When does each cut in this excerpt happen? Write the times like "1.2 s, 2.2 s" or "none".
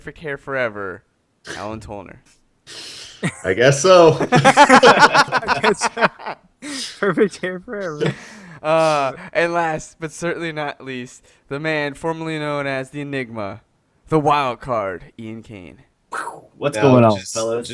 7.7 s